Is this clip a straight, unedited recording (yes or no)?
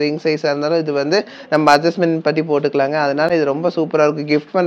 yes